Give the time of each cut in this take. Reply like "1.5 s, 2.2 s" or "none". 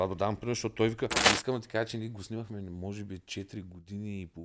1.2 s